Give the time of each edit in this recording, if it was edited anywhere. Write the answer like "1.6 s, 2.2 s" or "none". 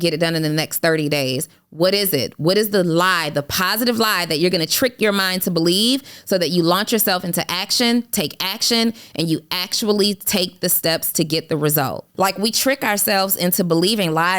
12.1 s

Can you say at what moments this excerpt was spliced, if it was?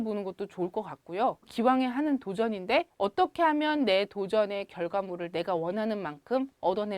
1.5 s, 2.9 s

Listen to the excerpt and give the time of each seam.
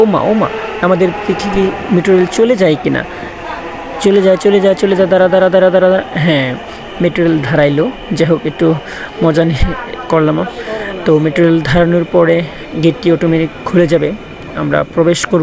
none

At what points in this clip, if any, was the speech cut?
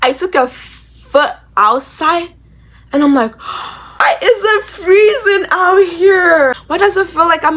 4.0 s, 6.6 s

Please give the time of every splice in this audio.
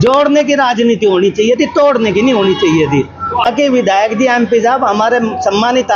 3.4 s

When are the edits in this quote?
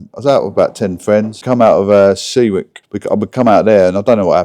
1.4 s, 2.7 s

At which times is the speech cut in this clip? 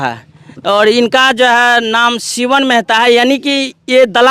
none

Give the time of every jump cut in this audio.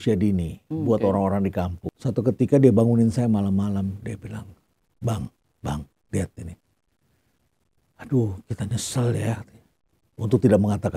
1.8 s

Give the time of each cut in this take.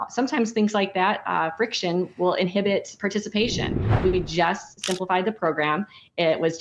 3.8 s

